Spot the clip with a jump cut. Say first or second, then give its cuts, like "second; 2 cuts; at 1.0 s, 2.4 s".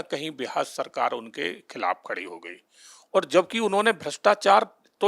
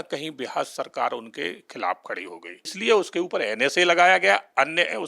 second; 1 cut; at 2.8 s